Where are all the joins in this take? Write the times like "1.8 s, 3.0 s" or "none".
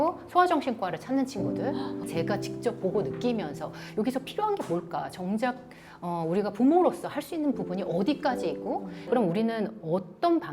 9.0 s